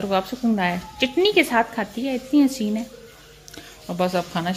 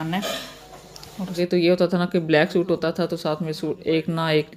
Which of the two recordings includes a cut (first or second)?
second